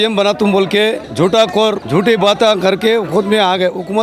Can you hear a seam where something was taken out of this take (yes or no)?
yes